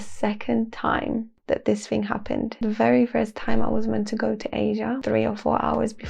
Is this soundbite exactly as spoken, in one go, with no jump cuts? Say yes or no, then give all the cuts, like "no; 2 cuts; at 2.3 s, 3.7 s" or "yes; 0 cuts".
no; 3 cuts; at 1.3 s, 2.5 s, 5.0 s